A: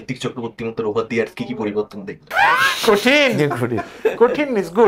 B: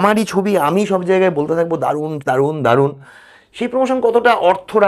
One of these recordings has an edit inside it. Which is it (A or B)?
A